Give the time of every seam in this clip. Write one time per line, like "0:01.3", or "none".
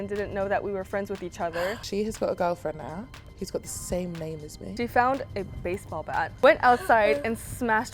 0:01.8
0:03.2
0:04.6
0:06.3